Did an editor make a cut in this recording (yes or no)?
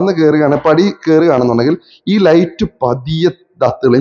no